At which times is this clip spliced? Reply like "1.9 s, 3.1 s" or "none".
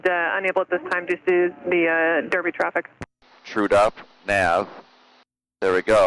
3.3 s